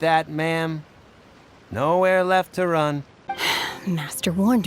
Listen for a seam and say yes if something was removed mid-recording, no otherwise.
yes